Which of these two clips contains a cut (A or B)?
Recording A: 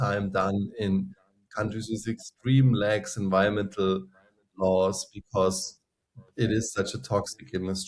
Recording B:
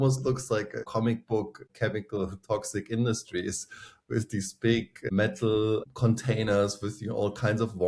B